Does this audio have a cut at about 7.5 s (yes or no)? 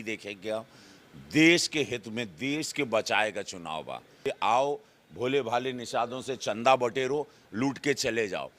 no